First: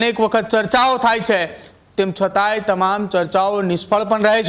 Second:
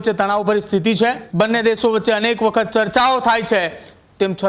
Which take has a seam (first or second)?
second